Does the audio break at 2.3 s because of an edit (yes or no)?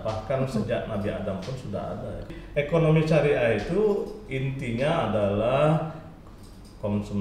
yes